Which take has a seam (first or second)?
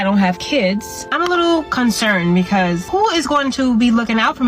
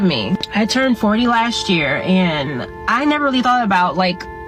first